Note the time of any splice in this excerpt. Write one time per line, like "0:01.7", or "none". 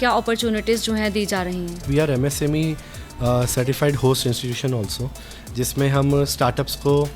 0:01.9